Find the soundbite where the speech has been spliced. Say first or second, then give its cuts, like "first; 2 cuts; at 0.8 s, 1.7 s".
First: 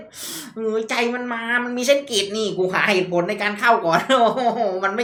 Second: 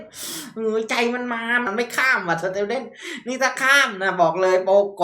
second; 1 cut; at 1.7 s